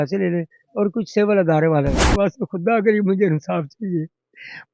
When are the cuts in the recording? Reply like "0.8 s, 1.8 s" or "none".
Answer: 2.1 s